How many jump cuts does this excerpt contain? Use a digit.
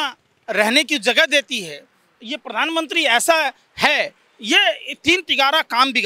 0